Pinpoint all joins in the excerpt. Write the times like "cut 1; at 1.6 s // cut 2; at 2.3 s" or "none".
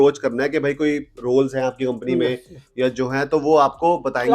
none